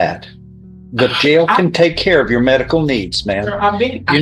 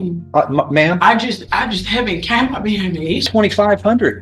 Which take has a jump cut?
second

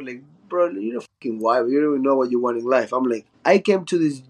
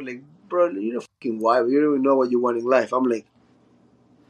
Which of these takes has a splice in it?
first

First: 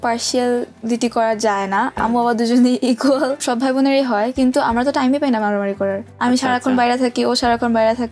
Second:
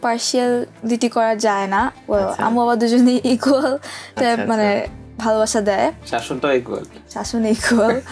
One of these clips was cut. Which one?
first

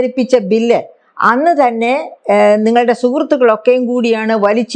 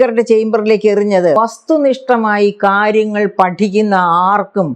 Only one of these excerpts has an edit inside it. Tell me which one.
second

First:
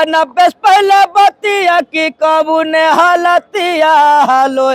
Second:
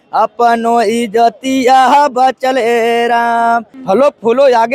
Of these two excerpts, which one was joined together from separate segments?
second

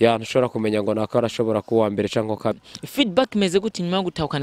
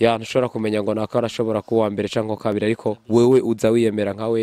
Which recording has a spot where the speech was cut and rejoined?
first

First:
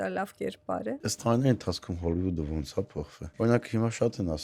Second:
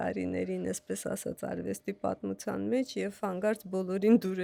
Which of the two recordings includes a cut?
first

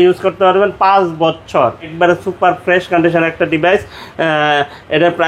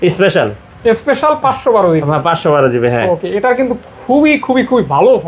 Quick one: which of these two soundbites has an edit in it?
first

